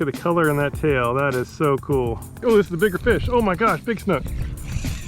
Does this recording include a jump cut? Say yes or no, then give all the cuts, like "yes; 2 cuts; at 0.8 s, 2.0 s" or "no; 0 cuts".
yes; 1 cut; at 2.3 s